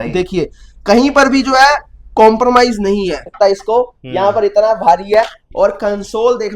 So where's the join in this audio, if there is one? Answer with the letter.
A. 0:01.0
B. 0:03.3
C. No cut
B